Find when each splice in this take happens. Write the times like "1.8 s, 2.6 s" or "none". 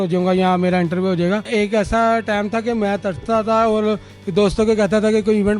1.4 s